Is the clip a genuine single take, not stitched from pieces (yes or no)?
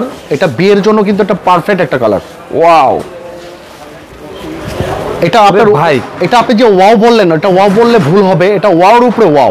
yes